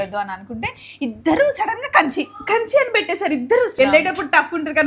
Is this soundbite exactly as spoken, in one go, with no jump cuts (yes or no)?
no